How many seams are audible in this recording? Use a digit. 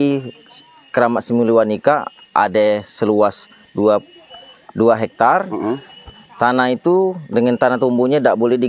0